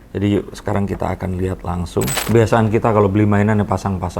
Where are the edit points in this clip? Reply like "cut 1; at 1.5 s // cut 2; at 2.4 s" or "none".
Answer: cut 1; at 2.2 s